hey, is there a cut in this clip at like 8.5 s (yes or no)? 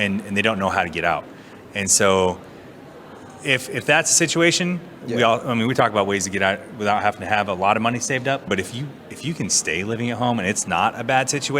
yes